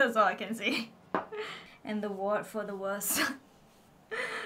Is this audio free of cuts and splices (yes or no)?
no